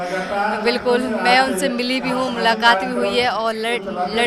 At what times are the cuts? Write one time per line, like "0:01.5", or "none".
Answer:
none